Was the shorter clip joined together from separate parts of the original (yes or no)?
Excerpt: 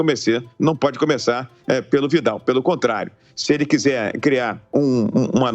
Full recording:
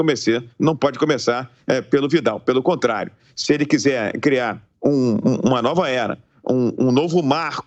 yes